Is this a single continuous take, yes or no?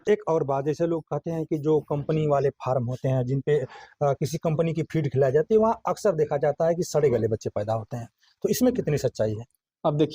yes